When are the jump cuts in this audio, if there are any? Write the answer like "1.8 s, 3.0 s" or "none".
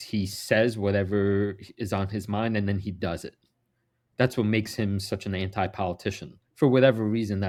none